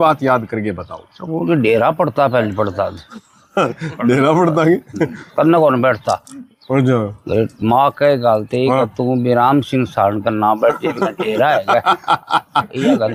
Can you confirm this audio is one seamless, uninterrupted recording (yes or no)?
yes